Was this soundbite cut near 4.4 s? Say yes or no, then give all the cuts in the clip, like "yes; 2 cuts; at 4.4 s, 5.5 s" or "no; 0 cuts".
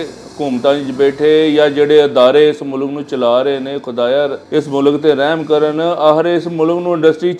yes; 1 cut; at 4.4 s